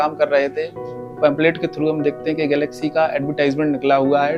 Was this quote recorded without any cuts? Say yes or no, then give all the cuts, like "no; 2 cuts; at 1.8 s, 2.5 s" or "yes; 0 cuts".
yes; 0 cuts